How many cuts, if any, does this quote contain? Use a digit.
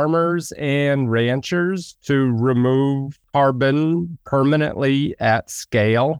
2